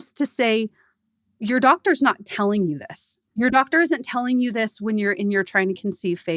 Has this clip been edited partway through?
yes; 1 cut; at 3.2 s

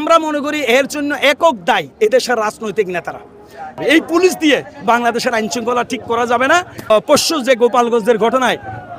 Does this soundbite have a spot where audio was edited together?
yes; 2 cuts; at 3.8 s, 6.9 s

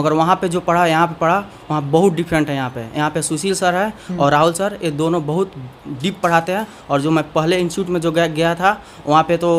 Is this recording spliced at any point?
no; 0 cuts

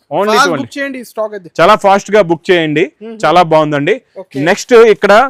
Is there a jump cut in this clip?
no; 0 cuts

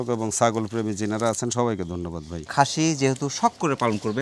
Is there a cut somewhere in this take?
yes; 1 cut; at 2.5 s

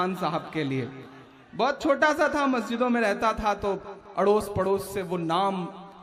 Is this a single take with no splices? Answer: yes; 0 cuts

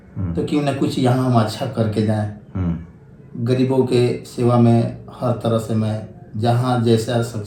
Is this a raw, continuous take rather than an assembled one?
yes; 0 cuts

